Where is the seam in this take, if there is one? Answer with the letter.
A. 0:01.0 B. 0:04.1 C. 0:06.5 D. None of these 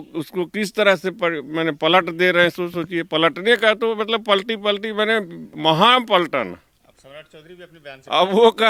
D